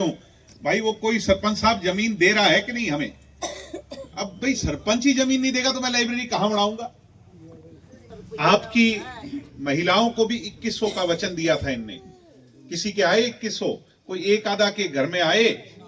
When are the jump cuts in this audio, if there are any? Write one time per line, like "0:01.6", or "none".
0:08.1